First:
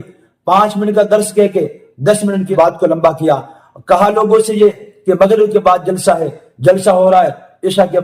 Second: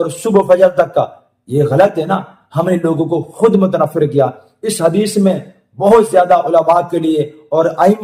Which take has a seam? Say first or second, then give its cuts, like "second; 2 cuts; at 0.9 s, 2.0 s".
first; 1 cut; at 2.5 s